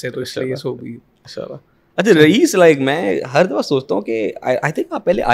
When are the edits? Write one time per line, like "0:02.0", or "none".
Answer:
none